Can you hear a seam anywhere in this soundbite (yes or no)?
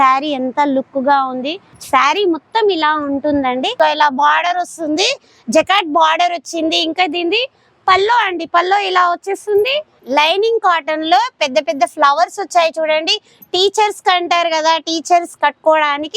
yes